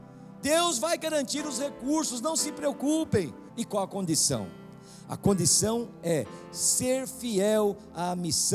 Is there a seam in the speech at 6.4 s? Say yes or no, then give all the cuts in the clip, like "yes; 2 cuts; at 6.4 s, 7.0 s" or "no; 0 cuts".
no; 1 cut; at 3.4 s